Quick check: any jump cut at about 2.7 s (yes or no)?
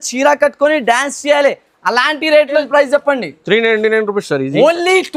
yes